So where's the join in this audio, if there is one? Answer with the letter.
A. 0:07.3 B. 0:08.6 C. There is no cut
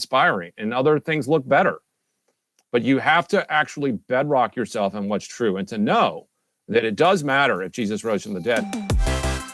B